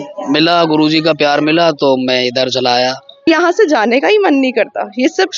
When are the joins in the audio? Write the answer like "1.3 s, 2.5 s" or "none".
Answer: 3.2 s